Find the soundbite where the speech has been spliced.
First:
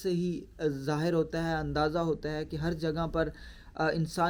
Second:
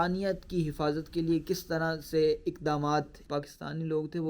second; 1 cut; at 3.2 s

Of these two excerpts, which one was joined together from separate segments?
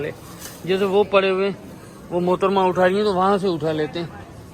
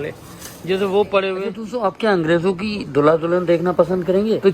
second; 1 cut; at 1.7 s

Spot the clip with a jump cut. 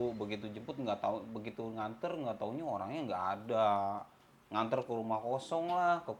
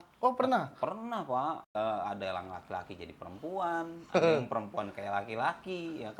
second; 1 cut; at 1.6 s

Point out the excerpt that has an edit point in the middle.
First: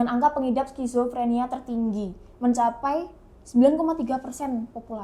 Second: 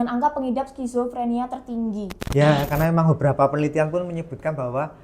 second; 1 cut; at 2.2 s

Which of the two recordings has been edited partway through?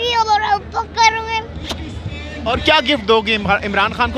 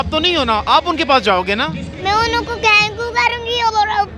second; 1 cut; at 1.9 s

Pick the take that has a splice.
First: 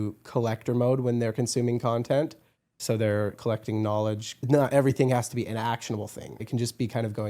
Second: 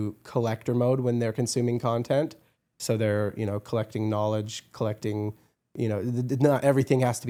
first; 3 cuts; at 3.4 s, 4.5 s, 6.4 s

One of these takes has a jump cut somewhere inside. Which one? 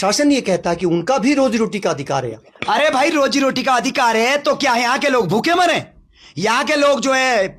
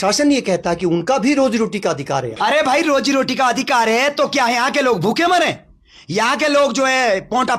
second; 1 cut; at 2.3 s

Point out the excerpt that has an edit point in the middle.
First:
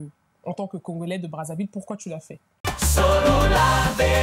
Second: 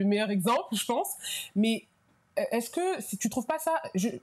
first; 1 cut; at 2.5 s

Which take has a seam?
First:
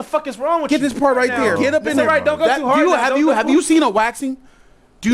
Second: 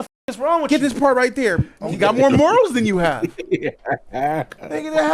second; 1 cut; at 1.5 s

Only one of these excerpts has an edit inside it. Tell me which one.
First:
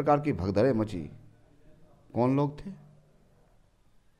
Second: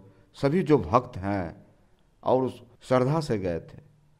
second; 1 cut; at 2.7 s

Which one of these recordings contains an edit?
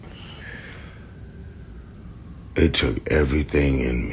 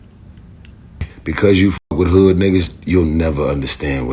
second; 1 cut; at 1.1 s

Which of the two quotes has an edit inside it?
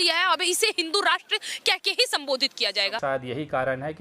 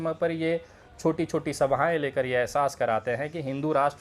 first; 1 cut; at 3.0 s

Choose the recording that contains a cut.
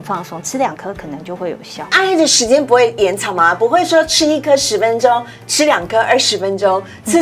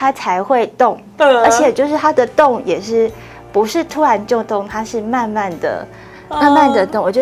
first; 1 cut; at 1.9 s

